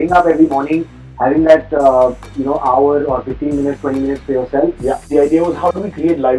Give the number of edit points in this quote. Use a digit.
1